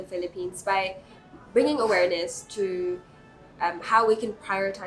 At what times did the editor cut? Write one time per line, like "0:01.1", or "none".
none